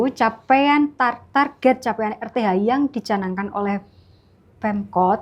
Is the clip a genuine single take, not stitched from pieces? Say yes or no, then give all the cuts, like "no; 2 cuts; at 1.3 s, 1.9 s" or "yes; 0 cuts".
yes; 0 cuts